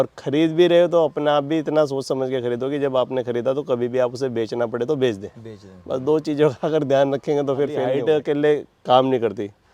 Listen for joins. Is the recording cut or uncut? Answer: cut